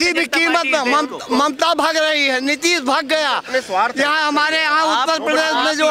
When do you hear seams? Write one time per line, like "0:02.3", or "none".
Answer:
none